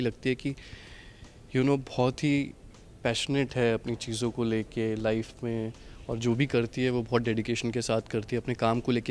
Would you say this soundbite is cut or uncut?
uncut